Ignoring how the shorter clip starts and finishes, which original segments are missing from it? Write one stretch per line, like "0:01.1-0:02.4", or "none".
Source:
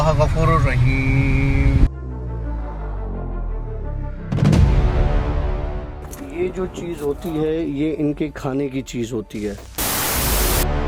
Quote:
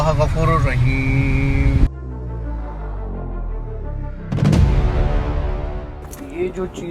none